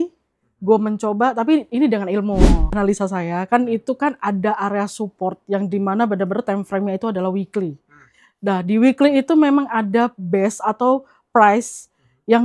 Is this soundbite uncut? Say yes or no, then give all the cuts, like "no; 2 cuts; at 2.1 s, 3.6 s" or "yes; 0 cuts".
no; 1 cut; at 2.7 s